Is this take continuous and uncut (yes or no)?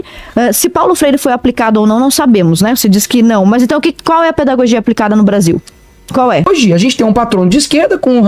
no